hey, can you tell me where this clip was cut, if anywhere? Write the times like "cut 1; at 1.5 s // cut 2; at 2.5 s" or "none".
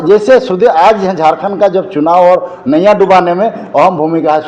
none